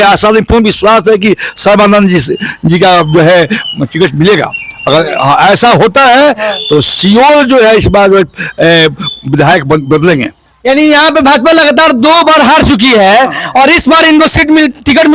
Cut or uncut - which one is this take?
uncut